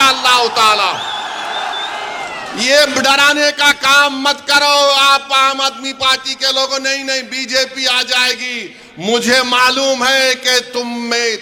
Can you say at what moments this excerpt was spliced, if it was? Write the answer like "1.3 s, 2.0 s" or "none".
none